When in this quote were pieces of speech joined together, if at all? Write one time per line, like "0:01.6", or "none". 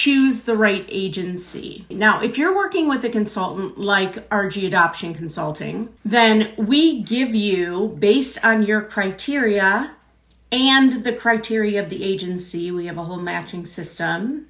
0:01.8
0:05.9